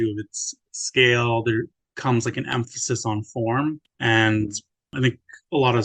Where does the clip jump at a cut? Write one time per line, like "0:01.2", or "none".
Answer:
0:01.8
0:03.9
0:04.9